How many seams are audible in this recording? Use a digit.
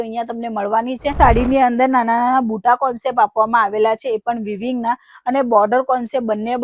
1